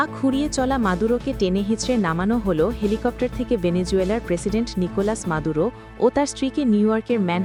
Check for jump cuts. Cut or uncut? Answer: uncut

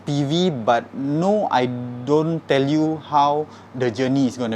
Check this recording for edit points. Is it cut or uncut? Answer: uncut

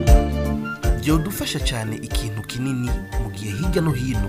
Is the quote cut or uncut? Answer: uncut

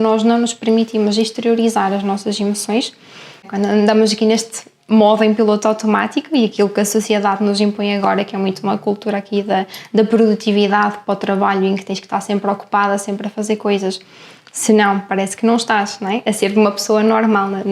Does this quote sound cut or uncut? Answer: cut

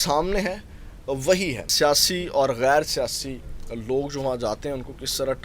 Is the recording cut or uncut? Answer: cut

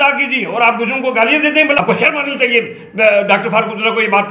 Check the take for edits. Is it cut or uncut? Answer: cut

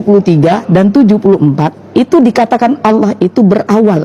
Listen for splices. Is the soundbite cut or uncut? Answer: uncut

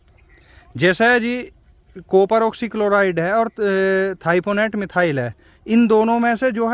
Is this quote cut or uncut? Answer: uncut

